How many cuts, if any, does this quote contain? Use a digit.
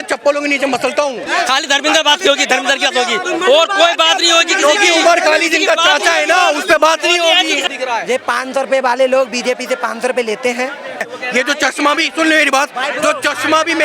3